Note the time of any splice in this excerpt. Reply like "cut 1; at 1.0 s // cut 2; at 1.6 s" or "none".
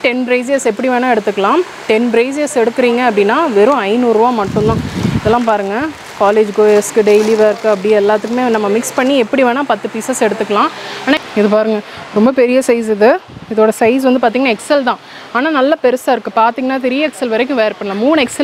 cut 1; at 11.2 s